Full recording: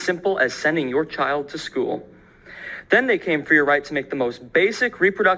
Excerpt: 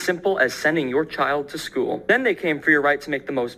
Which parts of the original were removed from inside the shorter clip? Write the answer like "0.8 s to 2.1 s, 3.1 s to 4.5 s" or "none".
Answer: 2.0 s to 2.8 s